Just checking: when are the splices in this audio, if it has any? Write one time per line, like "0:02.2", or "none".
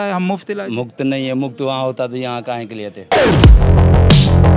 0:03.0